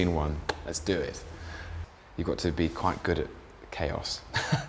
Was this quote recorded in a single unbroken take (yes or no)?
no